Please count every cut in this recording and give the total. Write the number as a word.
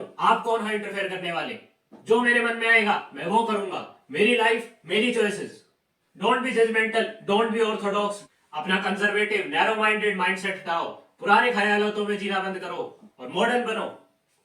zero